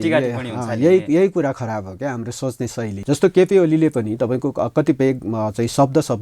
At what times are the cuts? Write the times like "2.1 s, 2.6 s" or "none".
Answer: 3.0 s